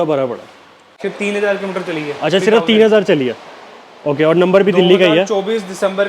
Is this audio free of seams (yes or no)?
no